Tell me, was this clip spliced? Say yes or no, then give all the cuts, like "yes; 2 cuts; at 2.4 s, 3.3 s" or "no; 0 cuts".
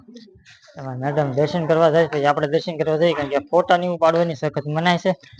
no; 0 cuts